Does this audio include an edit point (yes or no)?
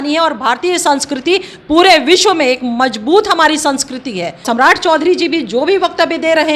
yes